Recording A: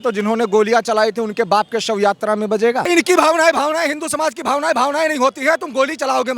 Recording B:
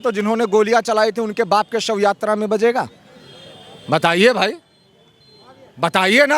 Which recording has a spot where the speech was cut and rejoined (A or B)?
A